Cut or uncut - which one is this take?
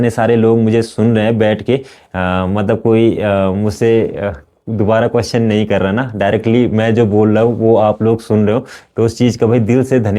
uncut